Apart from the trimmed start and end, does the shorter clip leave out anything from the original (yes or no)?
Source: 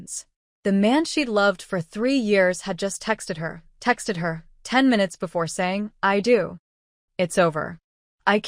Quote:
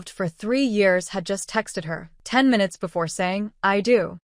yes